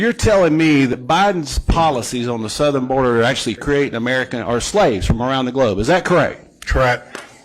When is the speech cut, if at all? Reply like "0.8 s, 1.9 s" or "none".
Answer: 0.9 s